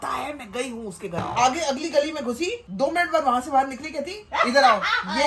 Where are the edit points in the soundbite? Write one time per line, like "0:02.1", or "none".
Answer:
0:01.3